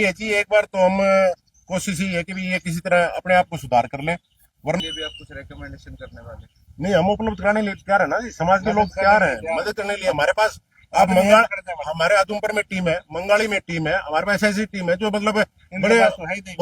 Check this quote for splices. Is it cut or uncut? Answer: cut